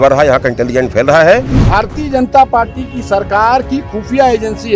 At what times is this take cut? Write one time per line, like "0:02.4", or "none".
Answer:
0:01.6